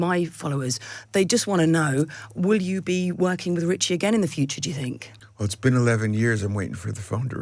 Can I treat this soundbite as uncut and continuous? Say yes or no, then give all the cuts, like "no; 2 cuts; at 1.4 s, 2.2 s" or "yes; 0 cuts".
yes; 0 cuts